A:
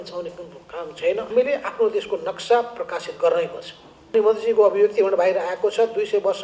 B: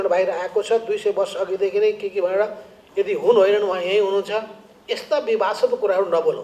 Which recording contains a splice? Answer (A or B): A